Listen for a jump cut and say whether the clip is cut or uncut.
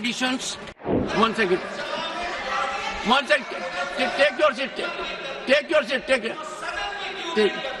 cut